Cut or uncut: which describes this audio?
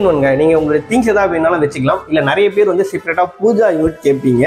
uncut